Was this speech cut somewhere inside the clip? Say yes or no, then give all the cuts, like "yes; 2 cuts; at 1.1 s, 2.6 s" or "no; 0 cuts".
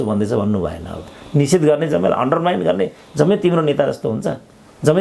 no; 0 cuts